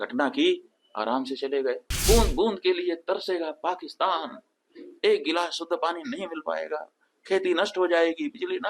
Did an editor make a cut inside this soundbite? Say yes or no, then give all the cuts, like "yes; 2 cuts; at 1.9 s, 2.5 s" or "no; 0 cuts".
yes; 1 cut; at 1.9 s